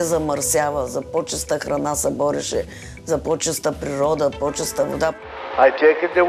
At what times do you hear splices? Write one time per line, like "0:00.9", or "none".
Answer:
0:05.2